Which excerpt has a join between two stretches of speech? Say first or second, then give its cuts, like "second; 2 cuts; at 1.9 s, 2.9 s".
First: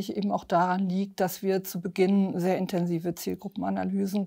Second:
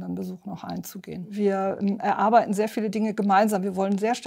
second; 1 cut; at 1.3 s